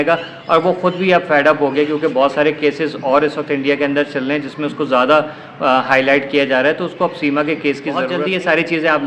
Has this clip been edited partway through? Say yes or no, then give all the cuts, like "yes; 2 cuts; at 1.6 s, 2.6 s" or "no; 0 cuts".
yes; 1 cut; at 8.1 s